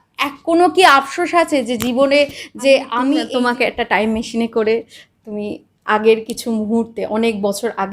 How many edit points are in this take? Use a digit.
1